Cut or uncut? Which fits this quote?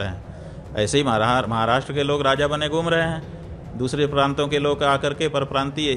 uncut